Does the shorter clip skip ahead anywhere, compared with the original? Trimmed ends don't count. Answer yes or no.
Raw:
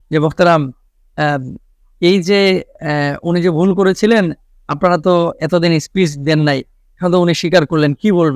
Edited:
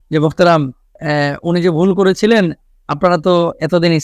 yes